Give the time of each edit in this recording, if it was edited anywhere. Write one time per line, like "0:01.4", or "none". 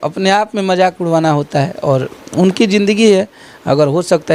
none